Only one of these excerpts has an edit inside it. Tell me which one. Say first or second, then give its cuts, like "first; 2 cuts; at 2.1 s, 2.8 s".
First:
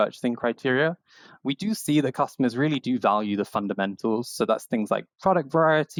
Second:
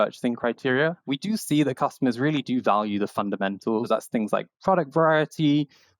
second; 2 cuts; at 1.0 s, 3.9 s